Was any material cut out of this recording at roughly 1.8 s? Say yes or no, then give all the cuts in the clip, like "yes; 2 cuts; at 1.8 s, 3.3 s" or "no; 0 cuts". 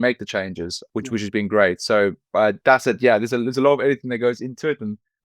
no; 0 cuts